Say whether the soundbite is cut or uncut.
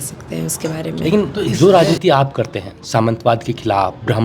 cut